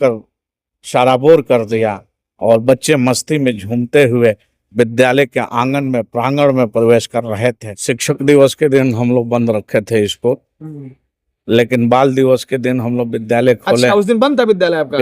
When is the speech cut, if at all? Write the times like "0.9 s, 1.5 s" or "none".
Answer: 7.7 s

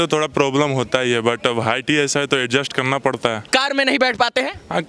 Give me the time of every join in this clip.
3.5 s

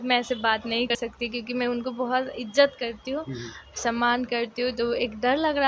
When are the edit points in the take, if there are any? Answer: 0.9 s

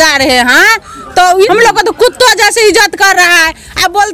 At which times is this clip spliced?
1.5 s

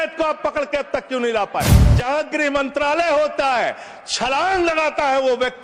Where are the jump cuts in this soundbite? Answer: 1.9 s

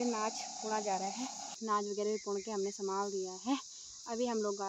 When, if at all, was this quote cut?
1.5 s

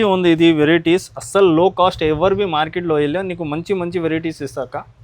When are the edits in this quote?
none

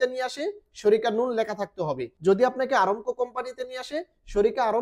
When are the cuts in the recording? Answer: 2.1 s

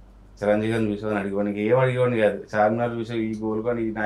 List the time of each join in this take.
none

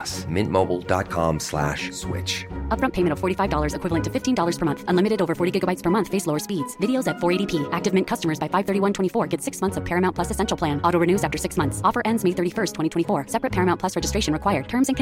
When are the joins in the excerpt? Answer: none

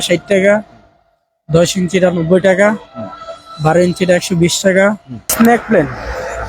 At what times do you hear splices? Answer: 5.3 s

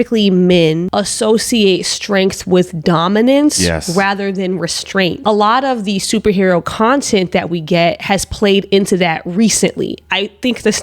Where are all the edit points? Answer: 0.9 s, 5.2 s

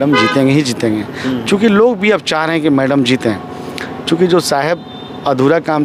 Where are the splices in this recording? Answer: none

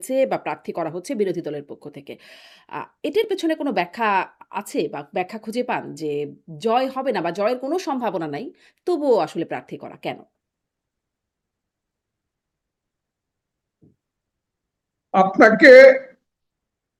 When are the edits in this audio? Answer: none

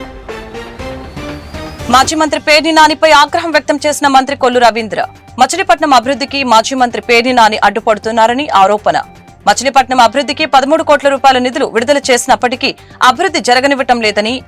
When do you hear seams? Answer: 1.7 s

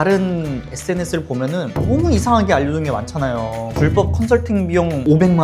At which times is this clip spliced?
none

